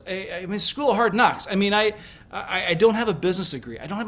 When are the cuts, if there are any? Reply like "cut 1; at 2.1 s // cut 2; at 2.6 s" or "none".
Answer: none